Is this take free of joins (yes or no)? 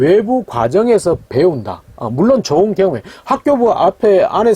yes